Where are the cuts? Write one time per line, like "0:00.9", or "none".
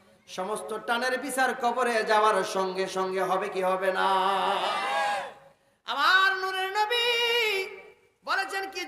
none